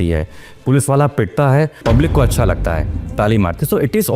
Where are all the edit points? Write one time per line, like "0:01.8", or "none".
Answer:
0:01.8

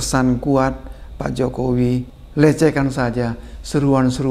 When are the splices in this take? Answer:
0:02.2

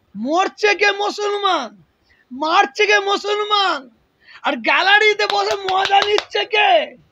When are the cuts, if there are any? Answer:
none

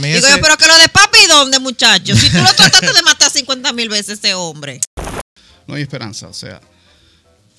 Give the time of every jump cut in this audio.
0:05.1

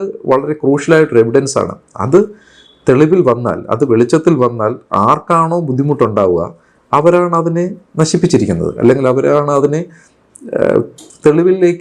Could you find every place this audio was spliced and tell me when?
none

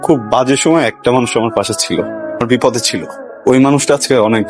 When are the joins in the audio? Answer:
none

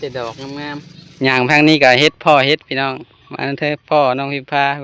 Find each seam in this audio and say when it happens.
0:01.0

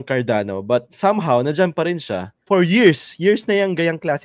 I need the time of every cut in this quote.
0:02.3

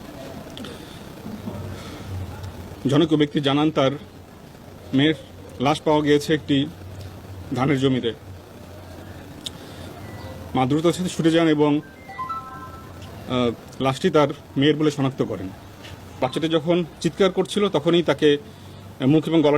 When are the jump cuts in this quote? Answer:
0:16.1

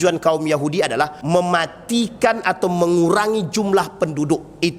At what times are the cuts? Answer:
0:01.2

